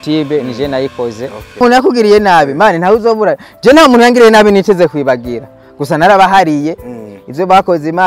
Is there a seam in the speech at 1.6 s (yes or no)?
yes